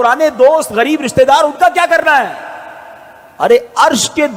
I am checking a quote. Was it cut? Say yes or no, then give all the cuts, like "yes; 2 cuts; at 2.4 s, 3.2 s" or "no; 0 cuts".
no; 0 cuts